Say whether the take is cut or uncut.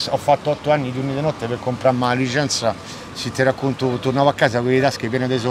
uncut